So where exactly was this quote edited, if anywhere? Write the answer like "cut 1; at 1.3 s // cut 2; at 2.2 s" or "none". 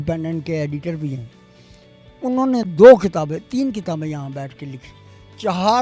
cut 1; at 4.9 s

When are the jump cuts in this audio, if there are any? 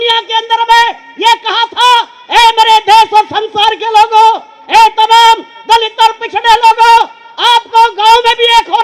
none

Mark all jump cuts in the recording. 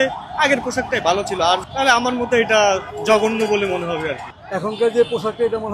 cut 1; at 1.7 s // cut 2; at 2.9 s // cut 3; at 4.3 s

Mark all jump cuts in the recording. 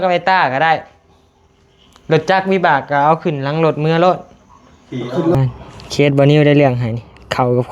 cut 1; at 5.4 s

